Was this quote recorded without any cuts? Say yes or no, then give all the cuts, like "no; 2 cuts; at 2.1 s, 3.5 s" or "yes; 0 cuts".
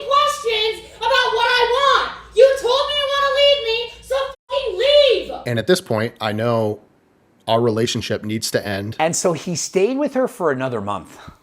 no; 3 cuts; at 2.2 s, 5.4 s, 8.9 s